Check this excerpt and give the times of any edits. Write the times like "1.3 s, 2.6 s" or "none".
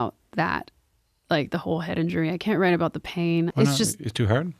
3.5 s

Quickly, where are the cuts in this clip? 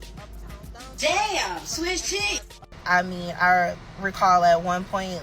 2.6 s

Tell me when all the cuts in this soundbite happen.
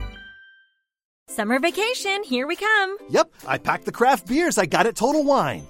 1.0 s

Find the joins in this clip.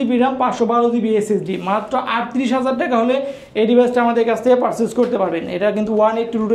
none

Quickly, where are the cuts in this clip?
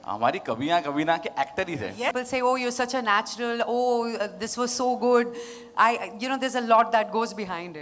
2.1 s

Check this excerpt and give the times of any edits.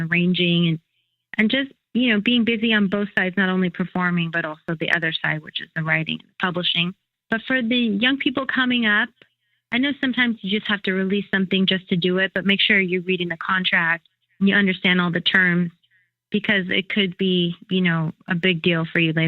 7.1 s

